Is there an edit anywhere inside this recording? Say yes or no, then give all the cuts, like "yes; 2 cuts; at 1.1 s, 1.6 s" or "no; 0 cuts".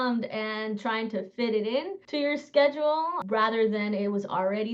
yes; 2 cuts; at 2.0 s, 3.2 s